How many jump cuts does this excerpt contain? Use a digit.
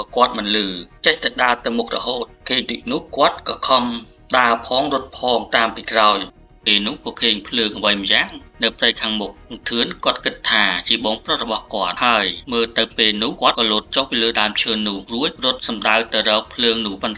1